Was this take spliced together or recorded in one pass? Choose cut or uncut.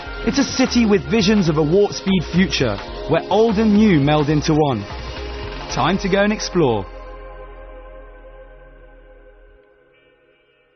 cut